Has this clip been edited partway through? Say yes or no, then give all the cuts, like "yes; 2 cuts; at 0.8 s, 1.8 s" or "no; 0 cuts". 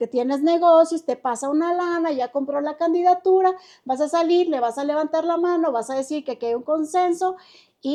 no; 0 cuts